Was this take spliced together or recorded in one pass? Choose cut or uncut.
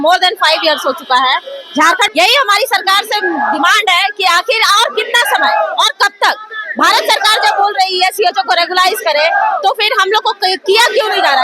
cut